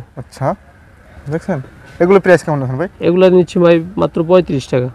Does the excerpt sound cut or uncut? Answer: uncut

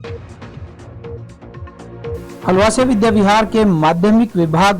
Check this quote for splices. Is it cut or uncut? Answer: cut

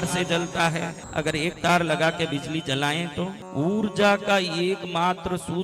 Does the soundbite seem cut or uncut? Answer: cut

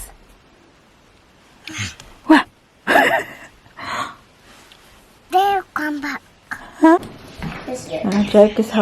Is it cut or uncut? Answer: cut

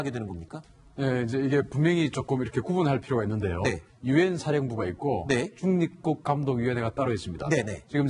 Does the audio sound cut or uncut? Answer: cut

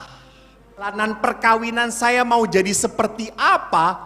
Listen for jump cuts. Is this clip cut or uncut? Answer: cut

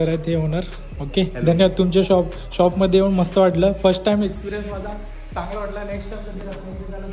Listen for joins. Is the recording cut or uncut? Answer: uncut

